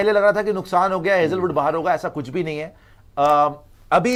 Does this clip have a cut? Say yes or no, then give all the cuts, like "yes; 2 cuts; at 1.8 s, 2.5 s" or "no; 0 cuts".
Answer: no; 0 cuts